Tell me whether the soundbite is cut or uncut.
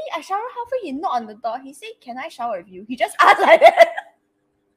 cut